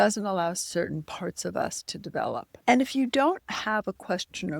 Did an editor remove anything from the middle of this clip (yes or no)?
yes